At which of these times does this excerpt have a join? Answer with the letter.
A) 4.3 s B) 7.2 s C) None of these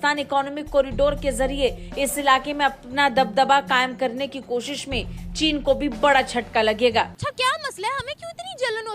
B